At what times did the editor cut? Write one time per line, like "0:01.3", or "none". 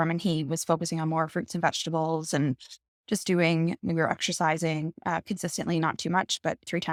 none